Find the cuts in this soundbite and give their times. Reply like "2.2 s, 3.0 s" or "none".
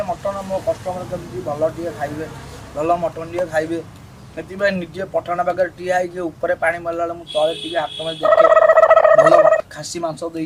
none